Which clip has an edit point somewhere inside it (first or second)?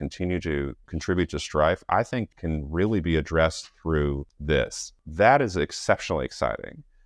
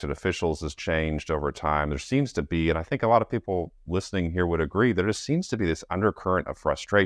first